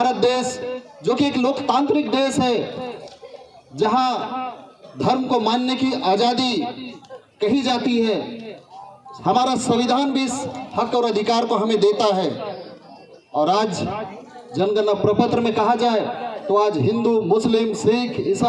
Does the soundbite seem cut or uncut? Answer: uncut